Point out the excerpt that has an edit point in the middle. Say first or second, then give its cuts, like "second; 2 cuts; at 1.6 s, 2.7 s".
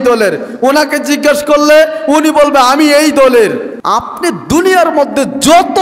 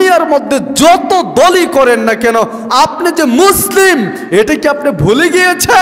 first; 1 cut; at 3.7 s